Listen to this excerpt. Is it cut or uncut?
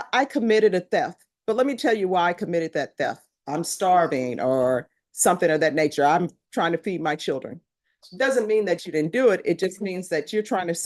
uncut